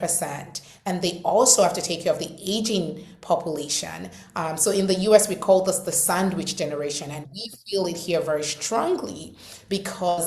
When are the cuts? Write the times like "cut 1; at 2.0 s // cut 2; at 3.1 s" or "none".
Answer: none